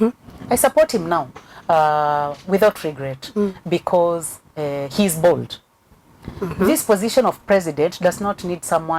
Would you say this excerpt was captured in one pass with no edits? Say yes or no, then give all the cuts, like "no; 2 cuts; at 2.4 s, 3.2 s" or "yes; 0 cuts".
yes; 0 cuts